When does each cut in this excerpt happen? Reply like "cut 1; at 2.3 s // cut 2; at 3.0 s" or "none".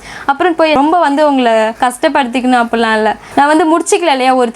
cut 1; at 0.8 s // cut 2; at 1.7 s // cut 3; at 3.3 s